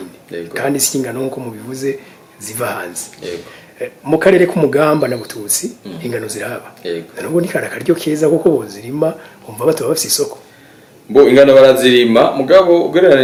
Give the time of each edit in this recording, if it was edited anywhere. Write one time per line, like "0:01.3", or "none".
none